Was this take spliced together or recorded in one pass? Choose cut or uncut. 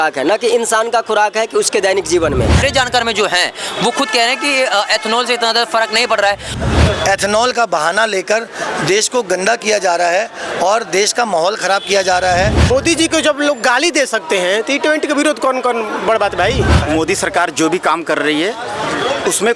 cut